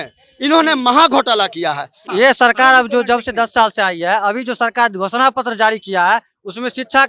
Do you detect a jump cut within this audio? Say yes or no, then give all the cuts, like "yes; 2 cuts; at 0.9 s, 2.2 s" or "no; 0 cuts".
no; 0 cuts